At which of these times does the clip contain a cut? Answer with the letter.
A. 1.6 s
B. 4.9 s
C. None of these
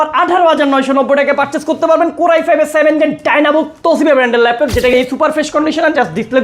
B